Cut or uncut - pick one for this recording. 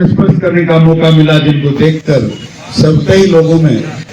uncut